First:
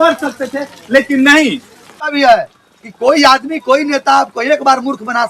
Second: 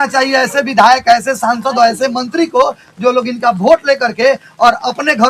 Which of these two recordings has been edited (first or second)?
first